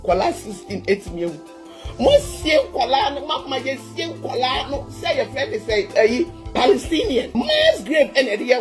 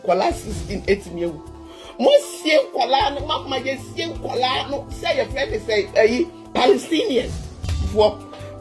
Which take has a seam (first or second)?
first